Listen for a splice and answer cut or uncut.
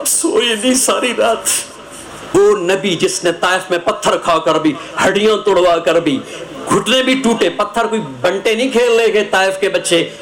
cut